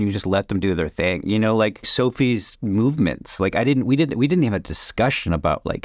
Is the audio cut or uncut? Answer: cut